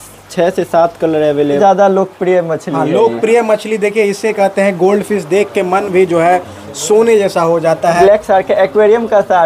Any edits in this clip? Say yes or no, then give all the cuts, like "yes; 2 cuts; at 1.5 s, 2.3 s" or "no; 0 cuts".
yes; 2 cuts; at 1.6 s, 8.0 s